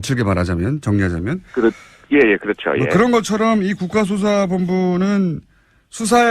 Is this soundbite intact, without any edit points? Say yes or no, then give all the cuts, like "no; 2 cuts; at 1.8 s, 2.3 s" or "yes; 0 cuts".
no; 1 cut; at 1.1 s